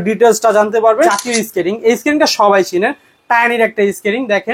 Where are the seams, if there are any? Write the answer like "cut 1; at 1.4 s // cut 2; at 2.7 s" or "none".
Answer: cut 1; at 1.2 s